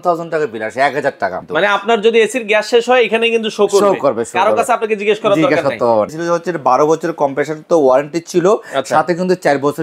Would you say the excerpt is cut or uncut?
cut